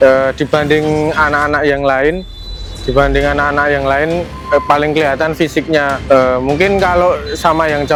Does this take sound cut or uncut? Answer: uncut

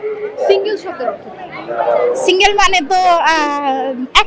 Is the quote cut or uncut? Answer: uncut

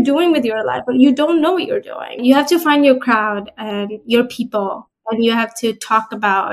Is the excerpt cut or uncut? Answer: cut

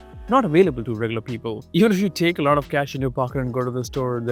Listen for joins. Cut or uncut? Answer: uncut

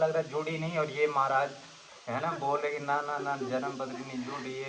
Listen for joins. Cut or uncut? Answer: uncut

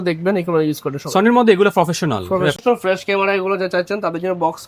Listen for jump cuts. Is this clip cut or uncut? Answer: cut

